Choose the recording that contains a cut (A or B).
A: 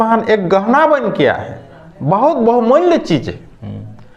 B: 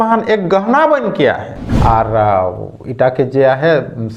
B